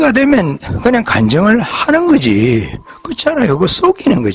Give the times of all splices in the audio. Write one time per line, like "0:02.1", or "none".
none